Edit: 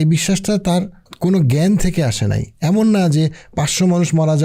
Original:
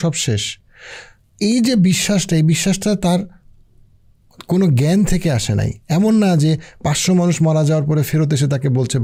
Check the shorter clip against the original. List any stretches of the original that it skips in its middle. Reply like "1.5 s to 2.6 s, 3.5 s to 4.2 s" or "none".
3.4 s to 4.3 s